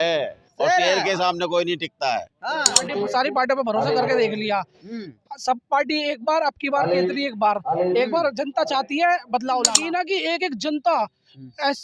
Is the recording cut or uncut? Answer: cut